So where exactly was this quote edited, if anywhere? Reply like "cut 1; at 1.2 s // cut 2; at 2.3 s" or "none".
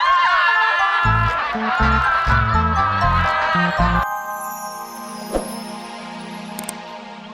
cut 1; at 4.0 s